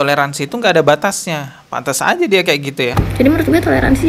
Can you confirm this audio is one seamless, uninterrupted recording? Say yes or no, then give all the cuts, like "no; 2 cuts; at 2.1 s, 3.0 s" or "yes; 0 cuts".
no; 1 cut; at 2.9 s